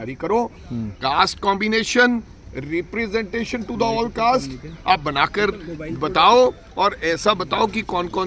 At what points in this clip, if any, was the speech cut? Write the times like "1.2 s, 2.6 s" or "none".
none